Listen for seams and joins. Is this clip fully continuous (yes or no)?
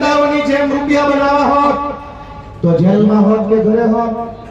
yes